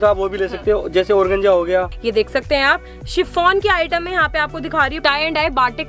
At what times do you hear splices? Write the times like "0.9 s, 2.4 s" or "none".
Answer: 1.9 s, 5.0 s